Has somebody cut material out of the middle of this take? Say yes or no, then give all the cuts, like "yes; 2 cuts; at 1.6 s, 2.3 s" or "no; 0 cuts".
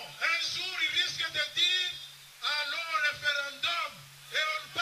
yes; 1 cut; at 2.3 s